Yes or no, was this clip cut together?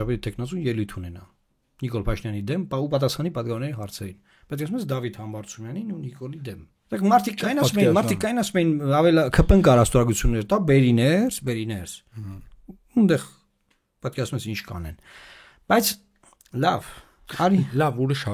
no